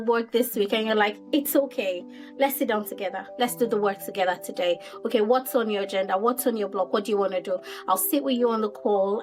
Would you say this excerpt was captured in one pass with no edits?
yes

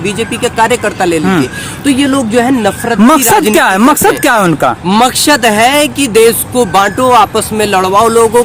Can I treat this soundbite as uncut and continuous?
yes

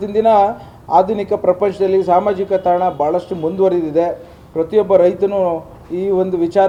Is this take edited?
no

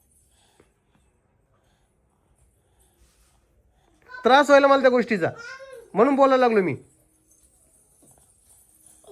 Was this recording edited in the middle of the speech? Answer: no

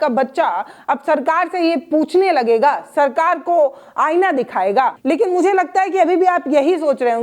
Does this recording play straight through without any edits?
no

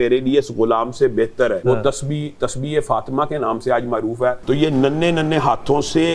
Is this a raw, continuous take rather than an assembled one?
no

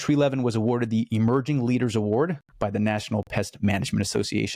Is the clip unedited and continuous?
yes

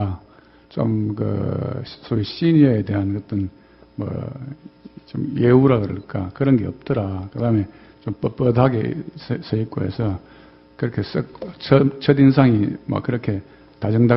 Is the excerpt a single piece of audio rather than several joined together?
yes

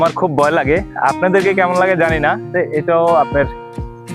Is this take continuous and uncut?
no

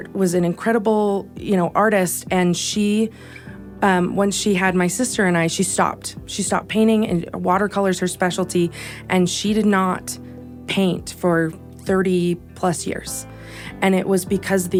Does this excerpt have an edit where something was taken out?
no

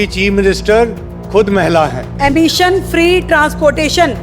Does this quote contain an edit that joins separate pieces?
yes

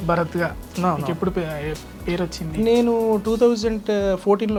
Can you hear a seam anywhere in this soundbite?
no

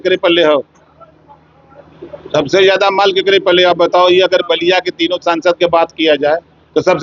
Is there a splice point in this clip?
no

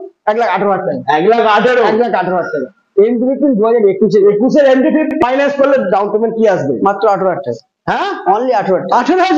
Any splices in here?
yes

